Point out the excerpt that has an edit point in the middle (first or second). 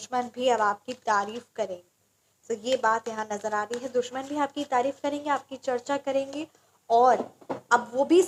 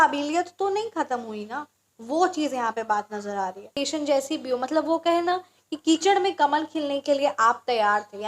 second